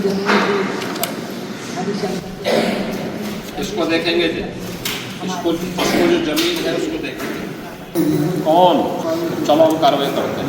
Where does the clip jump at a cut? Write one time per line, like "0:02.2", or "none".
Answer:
0:07.9
0:09.0